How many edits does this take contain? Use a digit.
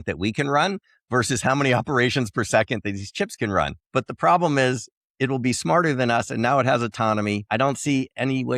2